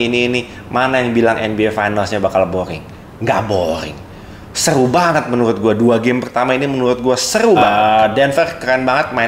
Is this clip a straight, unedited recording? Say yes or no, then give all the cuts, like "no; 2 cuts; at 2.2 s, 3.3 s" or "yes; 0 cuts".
no; 1 cut; at 7.6 s